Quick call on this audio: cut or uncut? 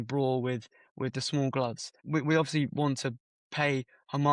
cut